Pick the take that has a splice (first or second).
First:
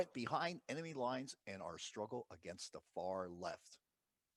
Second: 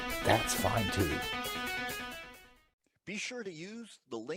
second